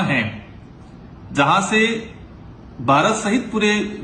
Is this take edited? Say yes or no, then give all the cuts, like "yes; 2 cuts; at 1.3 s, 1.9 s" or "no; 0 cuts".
yes; 1 cut; at 1.5 s